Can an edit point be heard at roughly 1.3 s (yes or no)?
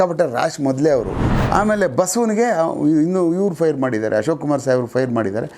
yes